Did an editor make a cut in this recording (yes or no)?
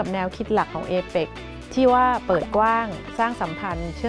no